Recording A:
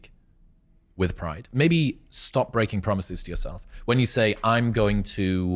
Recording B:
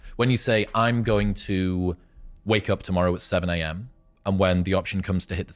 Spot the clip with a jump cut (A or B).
A